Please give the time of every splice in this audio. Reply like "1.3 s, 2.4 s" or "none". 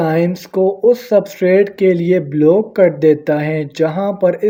none